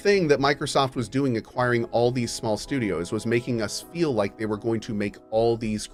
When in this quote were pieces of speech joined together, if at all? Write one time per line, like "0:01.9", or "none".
none